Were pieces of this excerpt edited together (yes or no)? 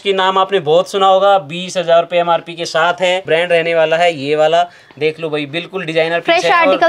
yes